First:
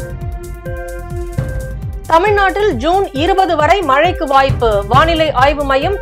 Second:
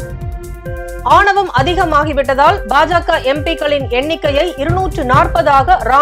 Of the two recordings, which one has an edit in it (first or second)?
first